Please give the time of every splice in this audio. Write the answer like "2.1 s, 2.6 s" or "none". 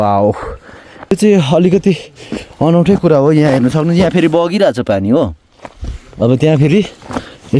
1.1 s